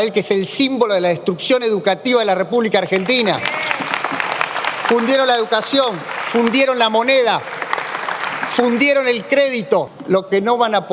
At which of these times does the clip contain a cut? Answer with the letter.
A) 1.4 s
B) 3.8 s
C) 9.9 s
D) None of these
C